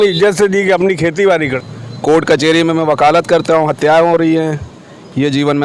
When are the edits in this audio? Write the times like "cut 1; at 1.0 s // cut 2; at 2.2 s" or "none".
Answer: cut 1; at 1.5 s